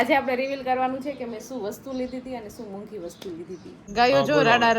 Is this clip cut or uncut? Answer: cut